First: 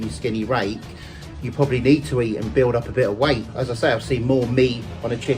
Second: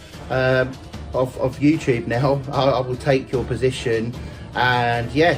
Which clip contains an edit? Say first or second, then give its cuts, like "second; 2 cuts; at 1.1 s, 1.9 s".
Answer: first; 2 cuts; at 2.5 s, 3.6 s